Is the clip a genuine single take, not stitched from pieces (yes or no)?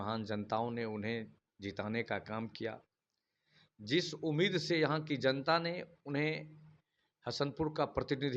yes